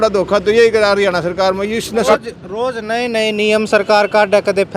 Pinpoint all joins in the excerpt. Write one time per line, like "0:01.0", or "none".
0:02.0